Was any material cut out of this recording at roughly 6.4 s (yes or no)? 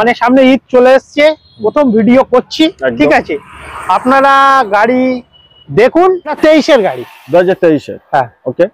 yes